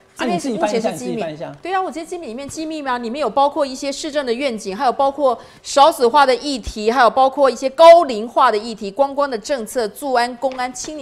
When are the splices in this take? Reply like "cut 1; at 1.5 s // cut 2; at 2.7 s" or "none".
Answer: none